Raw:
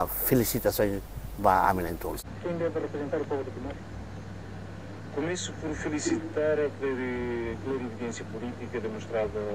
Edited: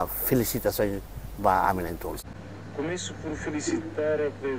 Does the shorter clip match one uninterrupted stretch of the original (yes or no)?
no